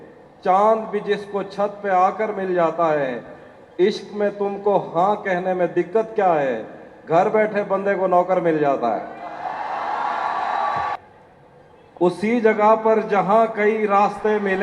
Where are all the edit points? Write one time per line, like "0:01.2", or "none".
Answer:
0:11.0